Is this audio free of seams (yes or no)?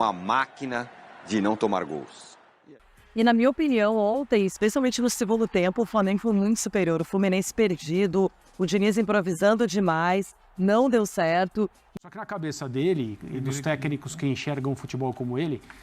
no